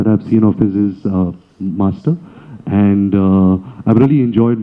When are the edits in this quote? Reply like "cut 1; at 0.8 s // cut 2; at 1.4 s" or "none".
none